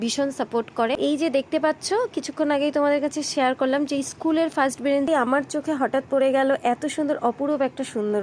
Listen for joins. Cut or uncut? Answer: cut